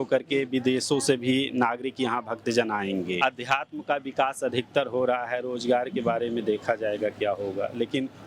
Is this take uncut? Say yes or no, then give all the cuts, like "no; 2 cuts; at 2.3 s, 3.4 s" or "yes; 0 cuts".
no; 1 cut; at 3.2 s